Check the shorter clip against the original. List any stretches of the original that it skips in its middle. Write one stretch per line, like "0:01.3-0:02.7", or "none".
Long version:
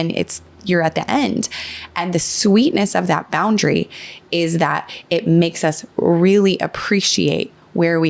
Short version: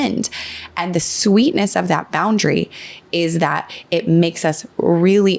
none